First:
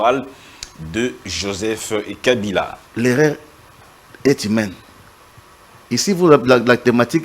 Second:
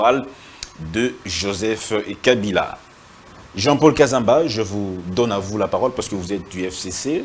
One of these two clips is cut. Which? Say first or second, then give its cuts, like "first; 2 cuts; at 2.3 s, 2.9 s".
first; 1 cut; at 2.8 s